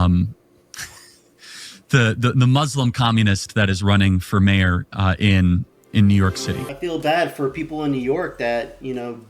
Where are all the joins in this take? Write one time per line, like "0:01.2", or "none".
0:06.5